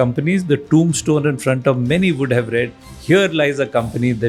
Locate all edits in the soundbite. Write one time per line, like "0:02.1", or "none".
none